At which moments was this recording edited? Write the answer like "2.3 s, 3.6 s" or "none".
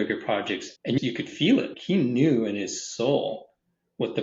1.0 s, 1.8 s